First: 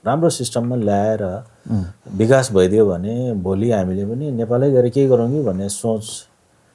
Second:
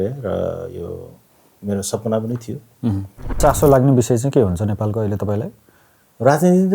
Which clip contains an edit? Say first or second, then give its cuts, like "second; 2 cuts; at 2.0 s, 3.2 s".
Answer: second; 1 cut; at 3.4 s